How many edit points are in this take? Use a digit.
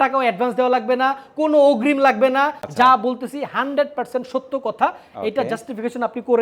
1